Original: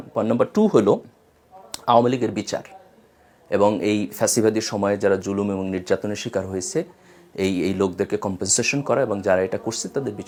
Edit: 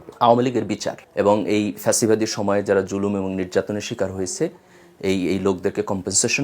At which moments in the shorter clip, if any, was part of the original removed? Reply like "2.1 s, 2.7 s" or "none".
1.0 s